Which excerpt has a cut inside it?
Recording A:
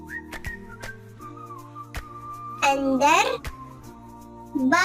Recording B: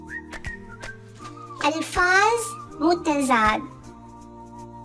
B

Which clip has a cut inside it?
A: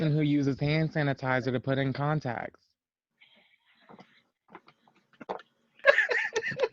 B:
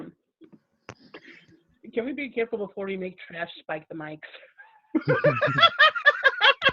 A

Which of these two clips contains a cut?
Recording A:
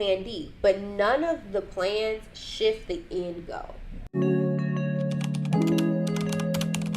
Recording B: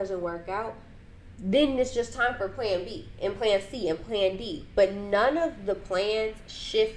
A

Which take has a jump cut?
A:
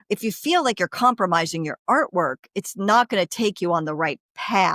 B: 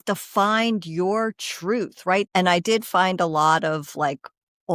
B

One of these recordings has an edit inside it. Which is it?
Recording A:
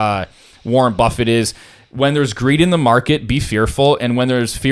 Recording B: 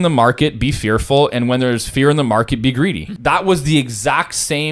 B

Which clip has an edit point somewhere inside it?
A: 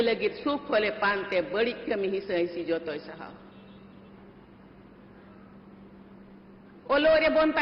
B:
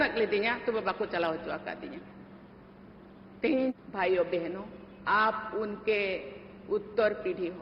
B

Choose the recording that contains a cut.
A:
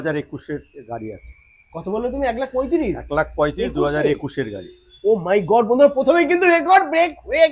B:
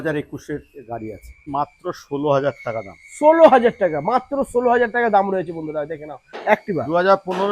B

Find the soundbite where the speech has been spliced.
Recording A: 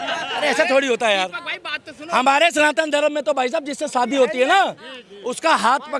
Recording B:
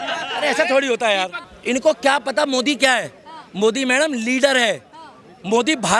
B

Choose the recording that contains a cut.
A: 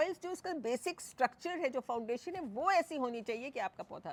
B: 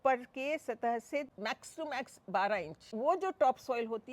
B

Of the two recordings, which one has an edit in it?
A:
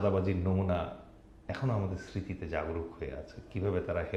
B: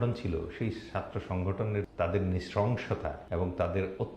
B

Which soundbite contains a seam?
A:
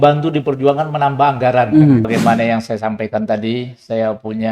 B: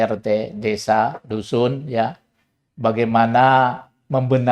A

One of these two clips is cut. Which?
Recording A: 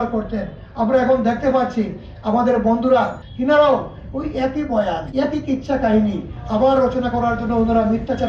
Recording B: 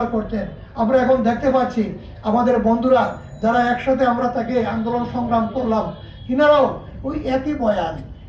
A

